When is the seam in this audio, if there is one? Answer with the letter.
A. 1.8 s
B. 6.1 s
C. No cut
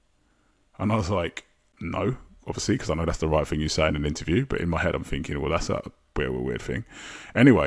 A